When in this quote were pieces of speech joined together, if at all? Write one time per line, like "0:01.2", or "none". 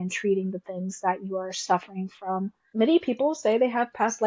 0:02.6